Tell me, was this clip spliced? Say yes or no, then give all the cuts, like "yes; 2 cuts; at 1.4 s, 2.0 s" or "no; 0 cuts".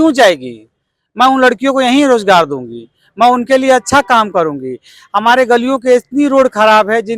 no; 0 cuts